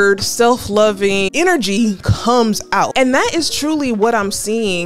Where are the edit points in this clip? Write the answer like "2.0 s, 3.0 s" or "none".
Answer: 1.3 s, 2.9 s

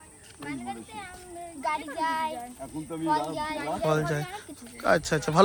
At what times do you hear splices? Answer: none

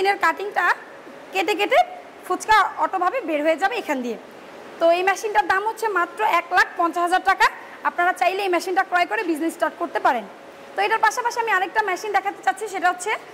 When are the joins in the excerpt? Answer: none

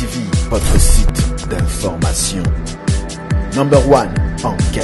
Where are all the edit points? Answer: 1.3 s, 3.0 s

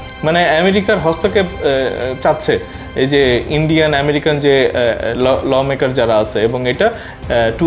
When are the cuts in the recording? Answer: none

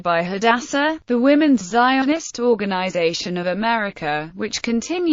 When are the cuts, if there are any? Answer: none

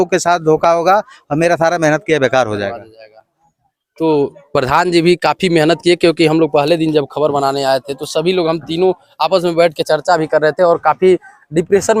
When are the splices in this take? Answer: none

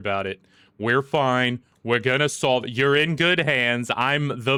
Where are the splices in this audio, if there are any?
none

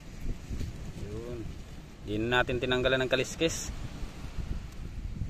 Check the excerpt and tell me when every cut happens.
none

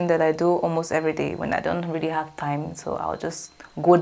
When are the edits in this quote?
none

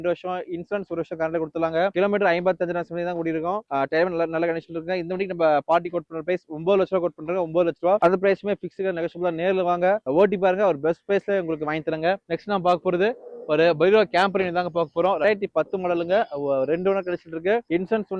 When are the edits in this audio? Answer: none

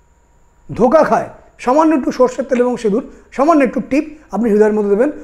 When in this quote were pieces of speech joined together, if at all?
1.5 s

